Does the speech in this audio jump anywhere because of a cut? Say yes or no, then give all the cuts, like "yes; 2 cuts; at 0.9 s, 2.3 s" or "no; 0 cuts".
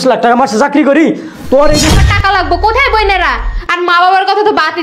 yes; 1 cut; at 1.9 s